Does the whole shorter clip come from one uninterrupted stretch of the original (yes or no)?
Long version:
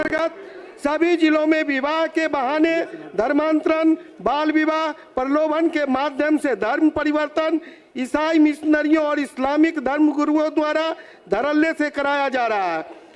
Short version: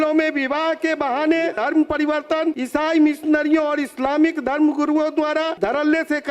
no